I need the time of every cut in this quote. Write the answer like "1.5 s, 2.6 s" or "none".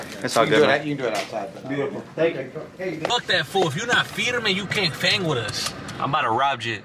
3.1 s